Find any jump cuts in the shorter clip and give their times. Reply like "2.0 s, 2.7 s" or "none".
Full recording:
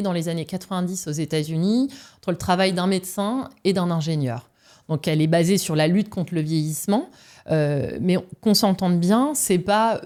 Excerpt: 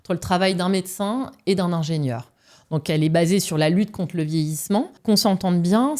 4.9 s